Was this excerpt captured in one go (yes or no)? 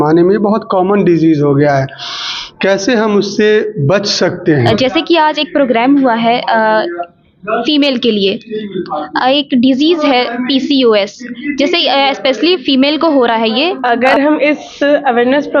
no